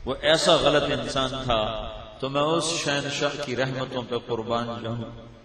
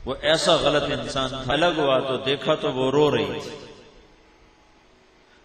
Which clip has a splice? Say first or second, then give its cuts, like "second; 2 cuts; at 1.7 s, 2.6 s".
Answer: first; 1 cut; at 1.5 s